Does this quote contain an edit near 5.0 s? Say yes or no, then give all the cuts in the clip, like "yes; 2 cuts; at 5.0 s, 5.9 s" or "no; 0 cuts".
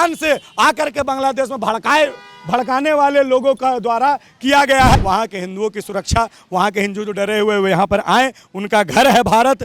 yes; 1 cut; at 5.0 s